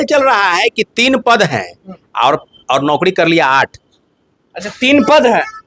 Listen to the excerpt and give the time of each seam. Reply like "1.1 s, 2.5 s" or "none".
none